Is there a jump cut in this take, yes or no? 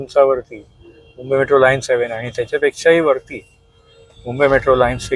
no